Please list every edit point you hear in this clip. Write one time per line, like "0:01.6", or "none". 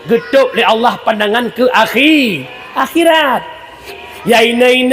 0:03.9